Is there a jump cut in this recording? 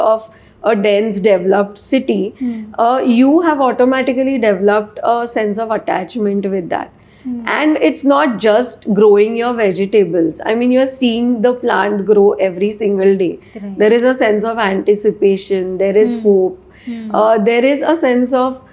no; 0 cuts

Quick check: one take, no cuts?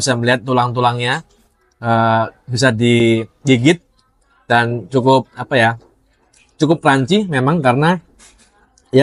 yes; 0 cuts

